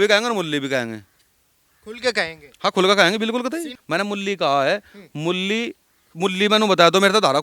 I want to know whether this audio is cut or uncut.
cut